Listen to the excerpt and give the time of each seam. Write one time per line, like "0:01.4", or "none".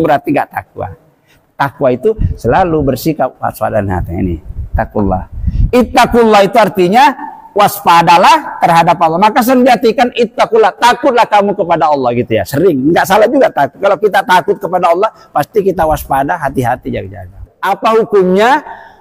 0:17.5